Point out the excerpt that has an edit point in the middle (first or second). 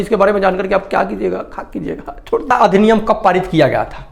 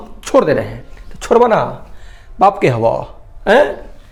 first